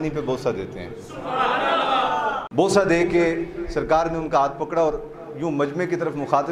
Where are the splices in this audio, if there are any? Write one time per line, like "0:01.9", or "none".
0:02.4